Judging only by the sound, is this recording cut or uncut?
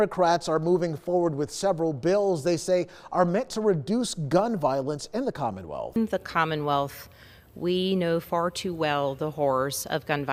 uncut